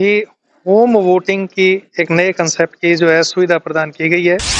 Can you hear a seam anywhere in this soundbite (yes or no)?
no